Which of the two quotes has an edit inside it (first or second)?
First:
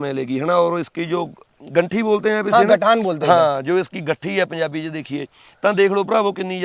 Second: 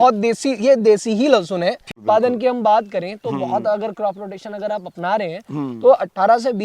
second